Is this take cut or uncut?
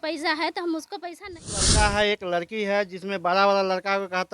cut